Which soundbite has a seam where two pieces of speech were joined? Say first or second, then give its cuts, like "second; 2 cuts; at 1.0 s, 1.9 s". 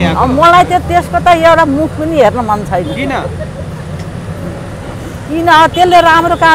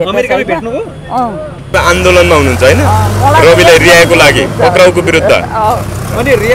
second; 1 cut; at 1.7 s